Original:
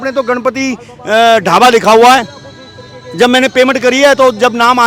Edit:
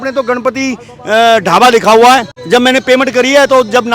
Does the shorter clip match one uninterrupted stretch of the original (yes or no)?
no